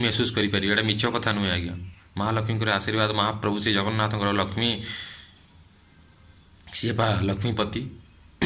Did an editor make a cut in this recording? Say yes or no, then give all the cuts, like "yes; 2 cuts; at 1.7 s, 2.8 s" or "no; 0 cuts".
no; 0 cuts